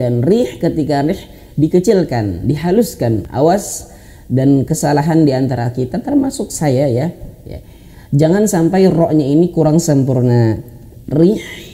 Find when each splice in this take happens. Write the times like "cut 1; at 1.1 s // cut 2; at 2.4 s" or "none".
cut 1; at 3.3 s